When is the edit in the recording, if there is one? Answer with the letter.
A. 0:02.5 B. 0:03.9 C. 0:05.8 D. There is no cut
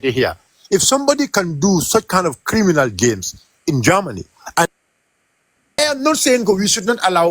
C